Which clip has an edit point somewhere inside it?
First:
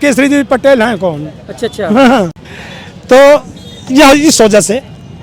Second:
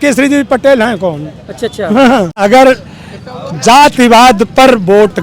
second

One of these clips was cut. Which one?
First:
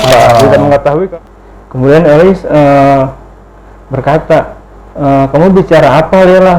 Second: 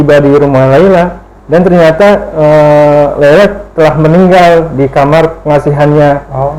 first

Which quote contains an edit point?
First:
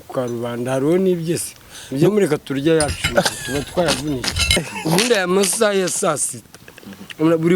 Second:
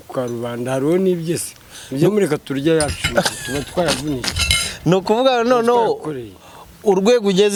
first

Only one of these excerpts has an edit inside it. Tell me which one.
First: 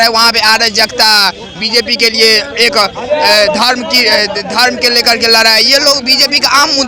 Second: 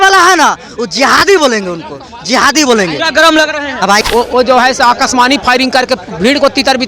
second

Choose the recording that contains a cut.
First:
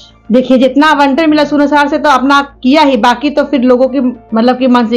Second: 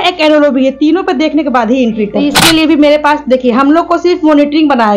second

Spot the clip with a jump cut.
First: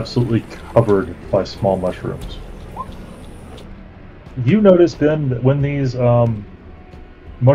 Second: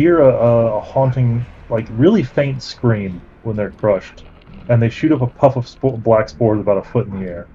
first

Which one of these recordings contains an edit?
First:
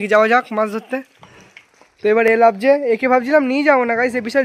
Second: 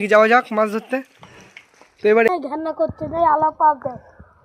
second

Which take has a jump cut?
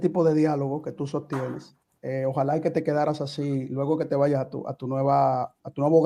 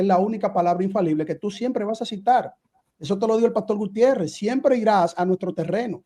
second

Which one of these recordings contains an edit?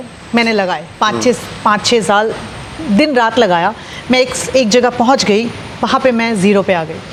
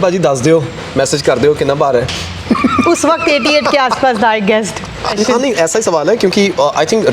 second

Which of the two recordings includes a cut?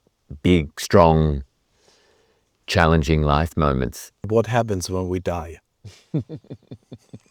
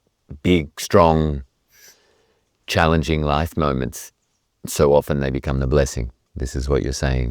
first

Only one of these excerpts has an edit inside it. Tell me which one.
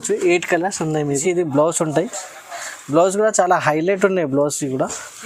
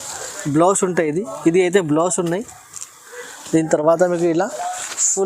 first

